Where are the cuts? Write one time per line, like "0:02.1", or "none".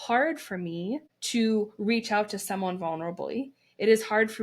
0:01.1